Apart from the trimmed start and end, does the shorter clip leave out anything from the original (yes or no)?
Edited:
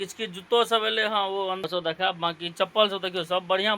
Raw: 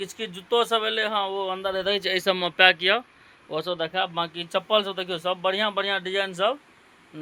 yes